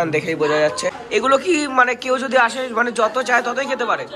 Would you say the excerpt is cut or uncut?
cut